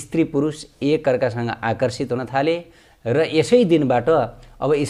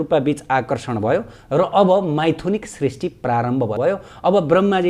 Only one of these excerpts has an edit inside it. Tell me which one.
second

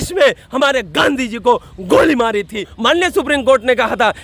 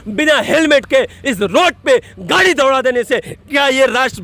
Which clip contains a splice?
first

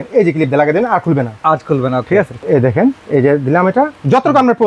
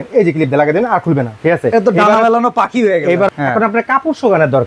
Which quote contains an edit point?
second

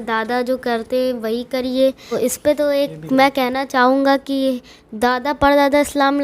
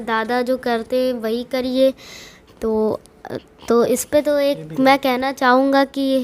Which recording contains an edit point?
first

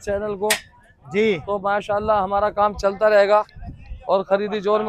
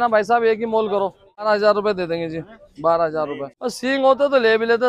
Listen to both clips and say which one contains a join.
second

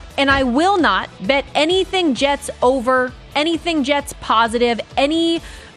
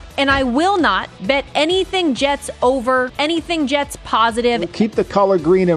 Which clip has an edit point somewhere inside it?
second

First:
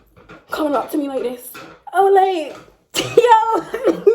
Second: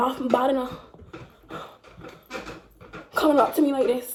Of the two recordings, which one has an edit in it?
first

